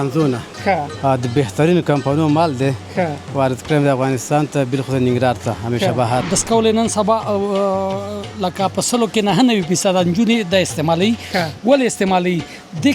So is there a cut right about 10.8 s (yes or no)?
no